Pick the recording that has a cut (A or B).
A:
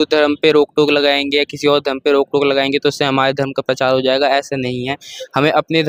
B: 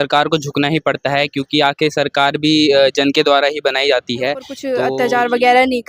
B